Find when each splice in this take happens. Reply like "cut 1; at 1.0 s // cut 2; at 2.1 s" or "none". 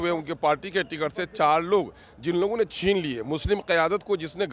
none